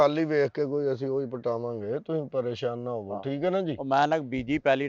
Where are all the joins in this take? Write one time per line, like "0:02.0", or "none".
none